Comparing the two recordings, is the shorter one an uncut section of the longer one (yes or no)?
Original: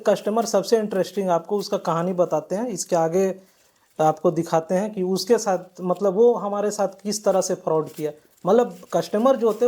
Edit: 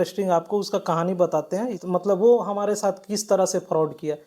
no